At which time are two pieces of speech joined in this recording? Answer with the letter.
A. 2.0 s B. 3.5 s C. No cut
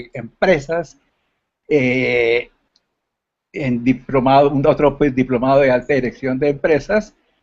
A